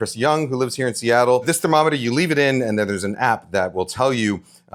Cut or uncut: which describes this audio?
uncut